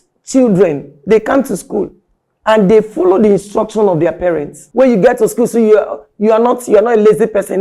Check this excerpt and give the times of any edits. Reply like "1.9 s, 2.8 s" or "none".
4.6 s

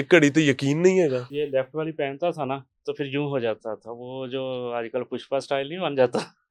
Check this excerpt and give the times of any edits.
1.3 s

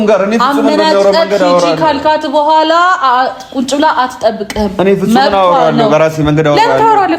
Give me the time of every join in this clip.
none

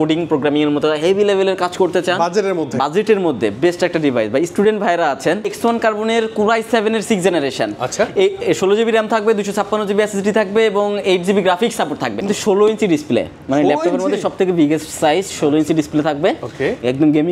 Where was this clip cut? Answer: 5.5 s, 12.2 s

